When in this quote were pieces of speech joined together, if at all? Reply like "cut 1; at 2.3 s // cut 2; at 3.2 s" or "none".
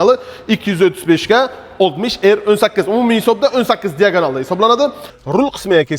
cut 1; at 5.1 s